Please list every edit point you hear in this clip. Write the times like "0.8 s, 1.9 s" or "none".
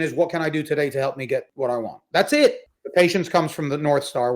1.5 s, 2.7 s